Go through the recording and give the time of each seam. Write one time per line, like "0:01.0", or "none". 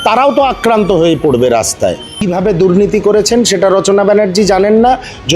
0:02.2